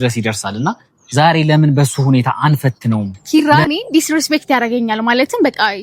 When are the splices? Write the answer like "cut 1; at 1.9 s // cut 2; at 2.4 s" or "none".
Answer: cut 1; at 3.1 s